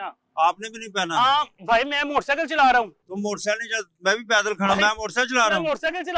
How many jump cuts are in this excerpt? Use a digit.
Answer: 0